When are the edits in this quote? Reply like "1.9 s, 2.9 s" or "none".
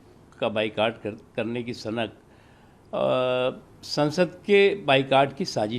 none